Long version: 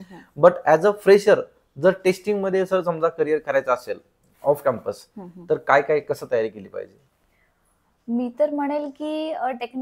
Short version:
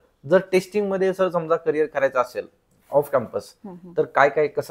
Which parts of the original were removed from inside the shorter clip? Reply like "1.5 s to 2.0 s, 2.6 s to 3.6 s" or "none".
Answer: none